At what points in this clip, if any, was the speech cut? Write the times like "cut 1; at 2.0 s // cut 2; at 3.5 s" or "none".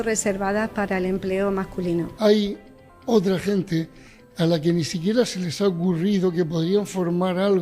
cut 1; at 2.1 s